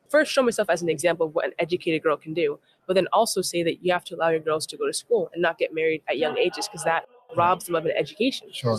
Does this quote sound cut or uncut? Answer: uncut